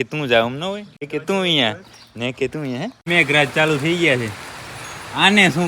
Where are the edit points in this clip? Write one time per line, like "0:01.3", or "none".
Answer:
0:01.1
0:03.1